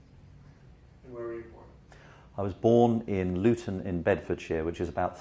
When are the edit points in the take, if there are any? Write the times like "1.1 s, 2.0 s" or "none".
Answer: none

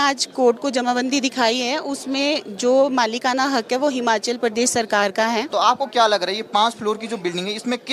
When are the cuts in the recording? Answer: 5.5 s

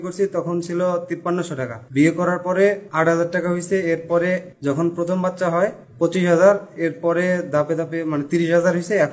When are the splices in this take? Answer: 1.4 s, 2.9 s, 4.5 s, 5.8 s

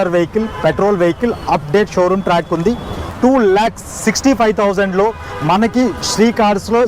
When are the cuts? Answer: 3.0 s

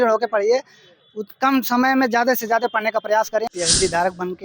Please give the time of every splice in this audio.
3.5 s

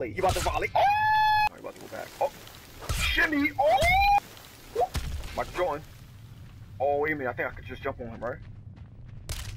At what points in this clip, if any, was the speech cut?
1.5 s, 4.2 s

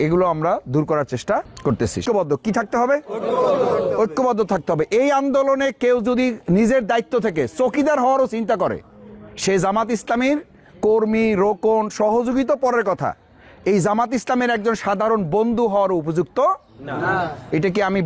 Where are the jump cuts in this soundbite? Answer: 2.0 s

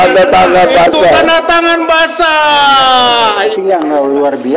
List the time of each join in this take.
3.5 s

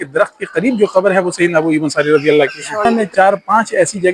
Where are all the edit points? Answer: 2.9 s

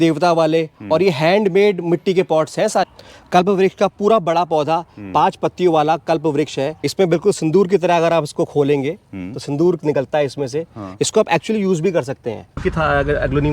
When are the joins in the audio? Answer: 2.9 s, 6.8 s, 12.6 s

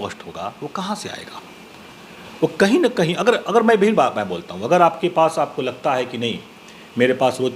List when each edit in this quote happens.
none

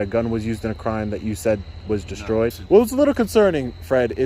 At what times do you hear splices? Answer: 2.6 s

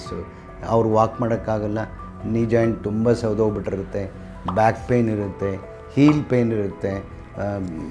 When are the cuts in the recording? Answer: none

